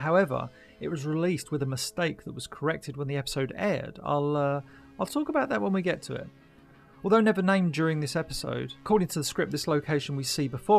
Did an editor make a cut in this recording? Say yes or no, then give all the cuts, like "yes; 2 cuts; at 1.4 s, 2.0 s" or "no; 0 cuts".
no; 0 cuts